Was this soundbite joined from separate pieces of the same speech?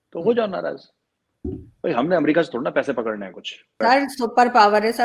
yes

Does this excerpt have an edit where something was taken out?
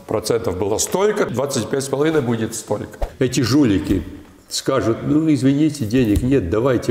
yes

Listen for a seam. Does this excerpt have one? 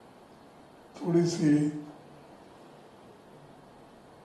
no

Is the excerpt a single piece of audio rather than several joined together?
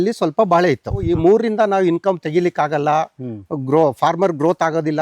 no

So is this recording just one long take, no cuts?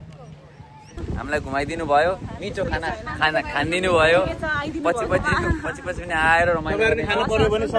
no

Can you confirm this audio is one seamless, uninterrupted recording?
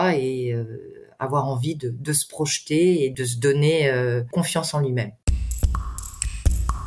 no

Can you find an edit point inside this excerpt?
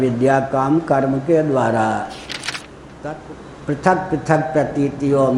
yes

